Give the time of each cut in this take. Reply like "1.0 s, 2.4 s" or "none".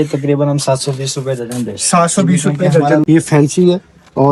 3.0 s